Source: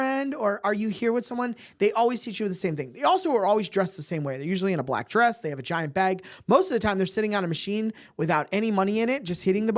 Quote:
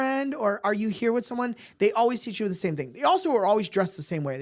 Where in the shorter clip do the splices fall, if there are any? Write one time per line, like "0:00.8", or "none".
none